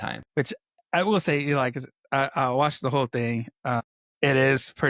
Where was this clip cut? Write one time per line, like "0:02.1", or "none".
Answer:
0:04.0